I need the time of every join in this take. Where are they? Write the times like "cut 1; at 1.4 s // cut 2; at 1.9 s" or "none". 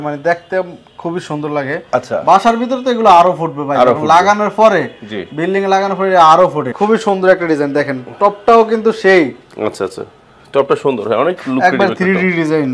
cut 1; at 6.7 s